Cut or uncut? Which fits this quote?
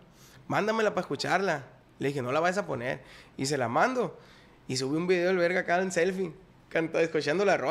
uncut